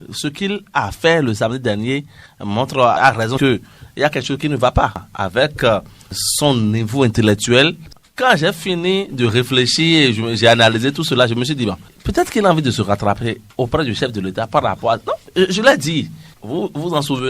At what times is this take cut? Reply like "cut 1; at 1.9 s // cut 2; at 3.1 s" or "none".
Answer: cut 1; at 5.1 s // cut 2; at 8.0 s